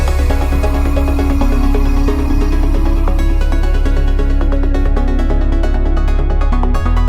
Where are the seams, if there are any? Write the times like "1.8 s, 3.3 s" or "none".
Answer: none